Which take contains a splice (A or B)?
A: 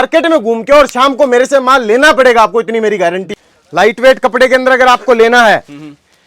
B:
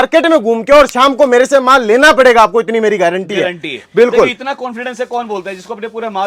A